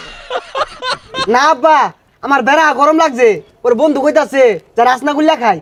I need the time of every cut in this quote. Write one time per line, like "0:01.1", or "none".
none